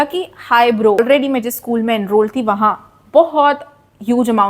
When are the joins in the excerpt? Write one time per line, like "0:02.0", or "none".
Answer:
0:01.0